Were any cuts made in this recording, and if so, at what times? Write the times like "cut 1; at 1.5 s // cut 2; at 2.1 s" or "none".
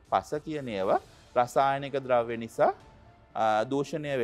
none